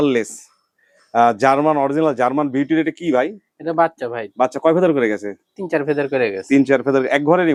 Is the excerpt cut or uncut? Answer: uncut